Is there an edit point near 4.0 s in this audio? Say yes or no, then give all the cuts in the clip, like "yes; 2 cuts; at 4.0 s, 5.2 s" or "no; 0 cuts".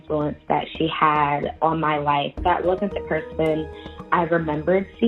no; 1 cut; at 2.4 s